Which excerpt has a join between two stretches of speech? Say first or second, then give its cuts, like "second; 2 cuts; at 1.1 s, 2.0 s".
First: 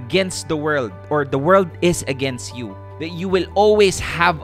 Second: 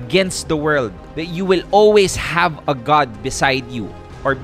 second; 1 cut; at 1.0 s